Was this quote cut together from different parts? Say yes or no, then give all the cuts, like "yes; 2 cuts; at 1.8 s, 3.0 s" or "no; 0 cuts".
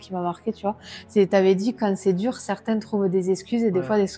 no; 0 cuts